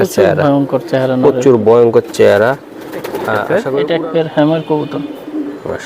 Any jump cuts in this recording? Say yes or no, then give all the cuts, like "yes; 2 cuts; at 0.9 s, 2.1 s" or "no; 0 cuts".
yes; 1 cut; at 3.8 s